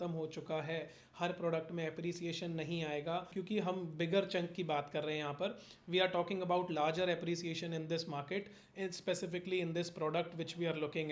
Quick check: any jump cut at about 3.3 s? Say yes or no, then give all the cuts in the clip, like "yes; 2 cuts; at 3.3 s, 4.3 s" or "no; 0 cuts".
yes; 1 cut; at 3.3 s